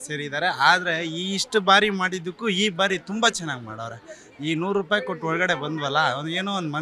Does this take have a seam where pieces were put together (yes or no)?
no